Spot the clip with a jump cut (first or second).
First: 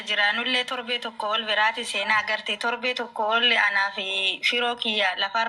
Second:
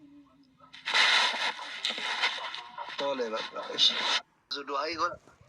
second